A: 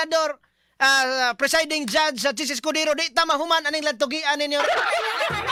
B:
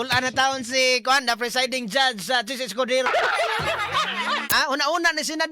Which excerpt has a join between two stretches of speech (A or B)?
B